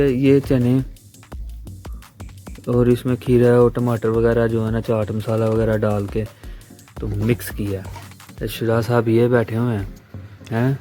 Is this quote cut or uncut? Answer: uncut